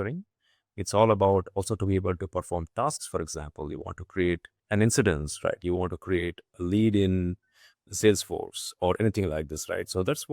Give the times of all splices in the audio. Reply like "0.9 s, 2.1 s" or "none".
4.6 s